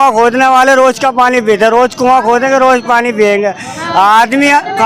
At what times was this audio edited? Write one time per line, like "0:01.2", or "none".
none